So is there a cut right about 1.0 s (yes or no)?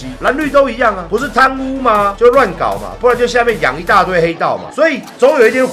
yes